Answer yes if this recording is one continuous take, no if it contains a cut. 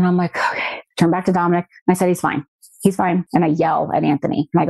yes